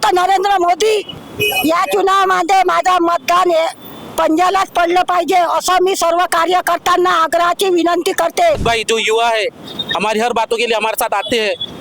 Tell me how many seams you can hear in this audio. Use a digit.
2